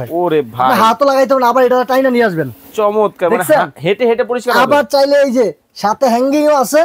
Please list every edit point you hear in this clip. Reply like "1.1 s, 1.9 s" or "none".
none